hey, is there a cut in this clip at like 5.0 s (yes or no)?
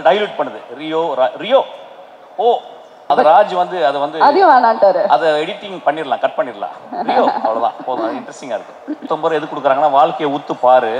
no